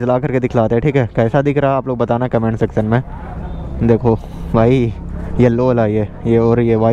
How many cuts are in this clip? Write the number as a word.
zero